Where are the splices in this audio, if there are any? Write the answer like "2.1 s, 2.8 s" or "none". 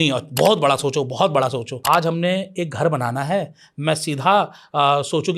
1.7 s

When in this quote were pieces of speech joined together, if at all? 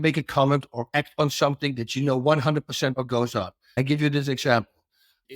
3.6 s

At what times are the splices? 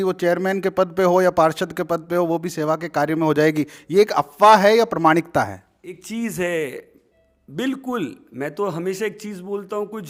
none

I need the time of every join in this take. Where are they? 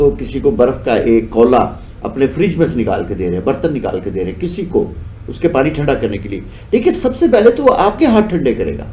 none

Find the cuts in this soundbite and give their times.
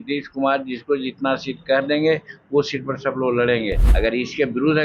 3.8 s

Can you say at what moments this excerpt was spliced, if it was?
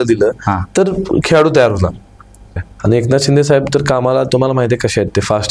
2.7 s

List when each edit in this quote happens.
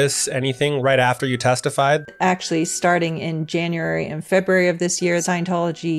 2.1 s, 5.2 s

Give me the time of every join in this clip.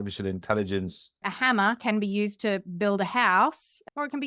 1.3 s

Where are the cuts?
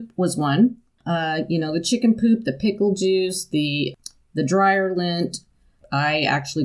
1.0 s, 3.9 s, 5.8 s

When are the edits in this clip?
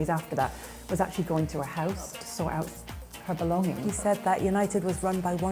2.2 s, 3.8 s

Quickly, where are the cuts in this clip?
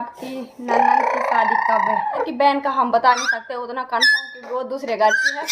2.2 s

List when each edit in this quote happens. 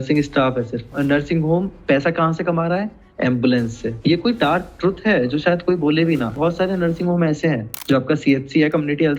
7.7 s

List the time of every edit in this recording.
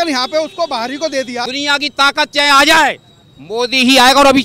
1.4 s

